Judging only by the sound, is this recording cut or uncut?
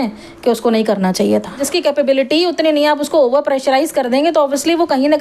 cut